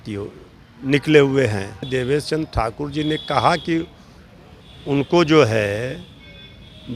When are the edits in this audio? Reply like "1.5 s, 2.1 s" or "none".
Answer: 1.9 s